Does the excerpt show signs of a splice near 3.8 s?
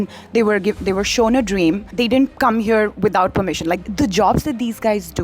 yes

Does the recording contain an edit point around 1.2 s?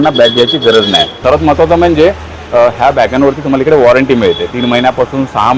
yes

